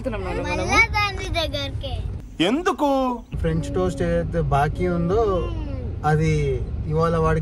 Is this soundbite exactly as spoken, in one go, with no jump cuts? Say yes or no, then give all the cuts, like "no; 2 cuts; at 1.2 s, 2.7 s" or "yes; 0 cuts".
no; 1 cut; at 3.3 s